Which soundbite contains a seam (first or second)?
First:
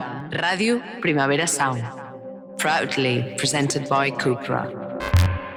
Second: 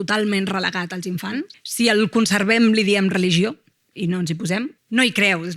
second